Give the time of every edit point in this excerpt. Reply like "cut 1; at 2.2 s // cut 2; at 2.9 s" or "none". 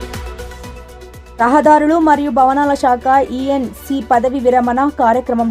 cut 1; at 1.1 s